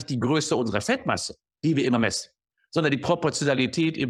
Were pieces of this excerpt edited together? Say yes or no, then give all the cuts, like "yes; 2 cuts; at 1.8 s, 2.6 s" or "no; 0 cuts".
no; 0 cuts